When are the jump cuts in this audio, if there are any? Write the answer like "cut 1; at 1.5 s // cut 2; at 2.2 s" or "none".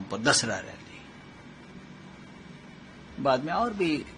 none